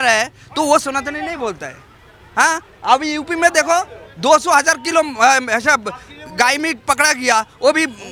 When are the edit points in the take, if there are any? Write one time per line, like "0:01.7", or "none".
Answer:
none